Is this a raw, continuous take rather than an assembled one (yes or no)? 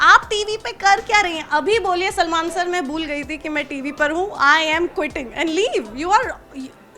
yes